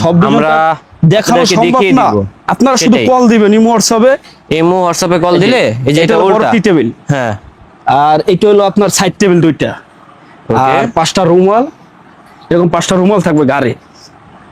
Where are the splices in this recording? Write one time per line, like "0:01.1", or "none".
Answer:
none